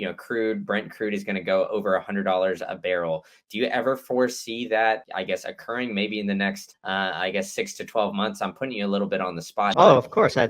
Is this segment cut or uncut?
cut